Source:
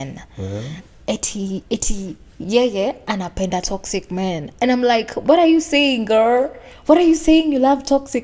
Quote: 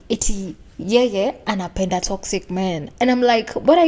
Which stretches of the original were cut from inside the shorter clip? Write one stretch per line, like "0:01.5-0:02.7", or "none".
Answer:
none